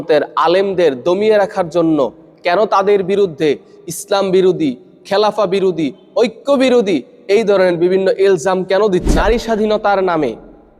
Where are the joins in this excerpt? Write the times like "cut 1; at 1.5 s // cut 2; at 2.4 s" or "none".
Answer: cut 1; at 9.1 s